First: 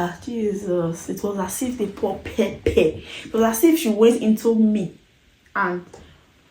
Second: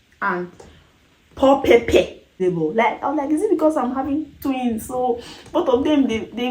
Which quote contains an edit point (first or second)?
second